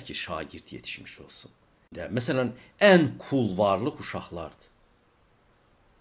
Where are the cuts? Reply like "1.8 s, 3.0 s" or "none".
1.9 s